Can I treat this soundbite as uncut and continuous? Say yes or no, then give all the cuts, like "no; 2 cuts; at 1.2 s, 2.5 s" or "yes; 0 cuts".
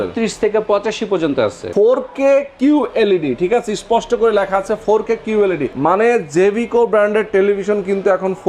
no; 2 cuts; at 1.6 s, 5.7 s